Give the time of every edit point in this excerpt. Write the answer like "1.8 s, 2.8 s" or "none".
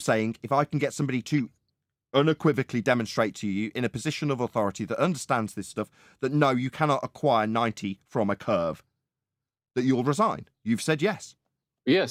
none